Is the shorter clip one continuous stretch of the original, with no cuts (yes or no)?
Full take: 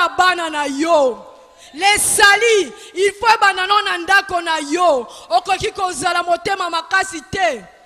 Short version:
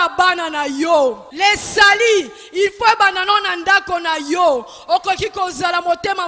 no